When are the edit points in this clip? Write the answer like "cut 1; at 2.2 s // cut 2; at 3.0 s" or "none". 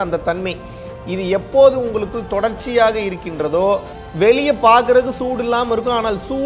cut 1; at 4.0 s

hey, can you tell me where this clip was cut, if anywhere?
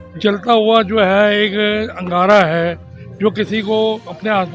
none

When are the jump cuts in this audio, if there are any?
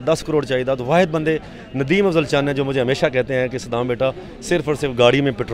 none

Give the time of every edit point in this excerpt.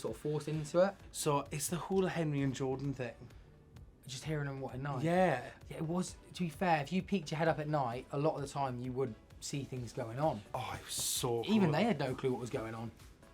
cut 1; at 1.1 s // cut 2; at 10.5 s

